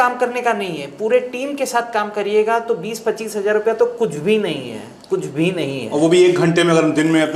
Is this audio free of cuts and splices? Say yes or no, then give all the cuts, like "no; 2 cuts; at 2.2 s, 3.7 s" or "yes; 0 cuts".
yes; 0 cuts